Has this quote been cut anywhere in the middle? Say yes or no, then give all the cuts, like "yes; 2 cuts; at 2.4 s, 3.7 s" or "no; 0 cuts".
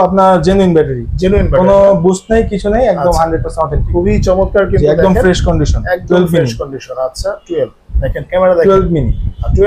no; 0 cuts